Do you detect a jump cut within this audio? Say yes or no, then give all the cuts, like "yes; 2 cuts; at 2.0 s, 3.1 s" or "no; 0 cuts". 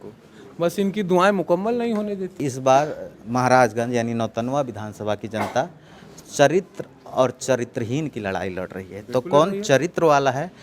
yes; 1 cut; at 2.4 s